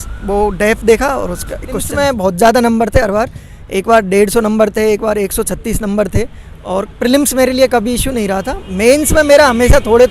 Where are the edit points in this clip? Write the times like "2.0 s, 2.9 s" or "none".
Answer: 1.9 s